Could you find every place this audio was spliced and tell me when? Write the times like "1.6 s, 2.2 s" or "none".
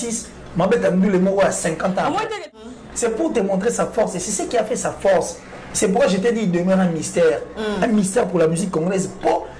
2.6 s